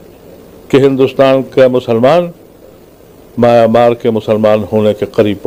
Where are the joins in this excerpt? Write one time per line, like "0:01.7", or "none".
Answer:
none